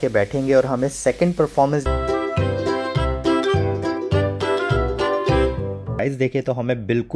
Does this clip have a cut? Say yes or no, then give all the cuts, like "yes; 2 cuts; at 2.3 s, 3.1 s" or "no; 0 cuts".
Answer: yes; 2 cuts; at 1.9 s, 6.0 s